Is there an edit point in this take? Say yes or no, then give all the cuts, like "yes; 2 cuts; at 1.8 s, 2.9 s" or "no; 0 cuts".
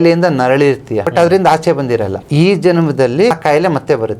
yes; 3 cuts; at 1.1 s, 2.2 s, 3.3 s